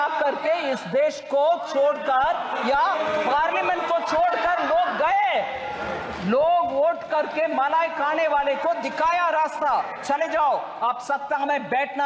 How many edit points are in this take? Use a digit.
0